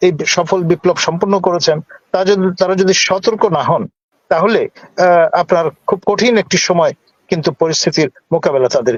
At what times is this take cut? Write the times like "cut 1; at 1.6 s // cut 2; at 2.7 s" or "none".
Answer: none